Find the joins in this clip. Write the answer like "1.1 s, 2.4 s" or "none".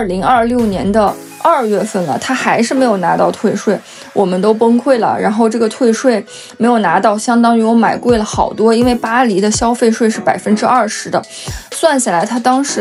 none